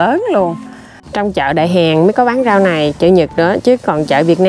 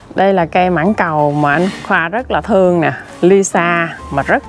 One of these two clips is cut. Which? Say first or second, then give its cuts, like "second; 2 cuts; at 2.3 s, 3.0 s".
first; 1 cut; at 1.0 s